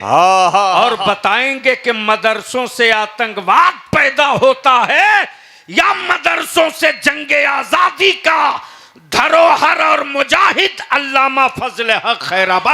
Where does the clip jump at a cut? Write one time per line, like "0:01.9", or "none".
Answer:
none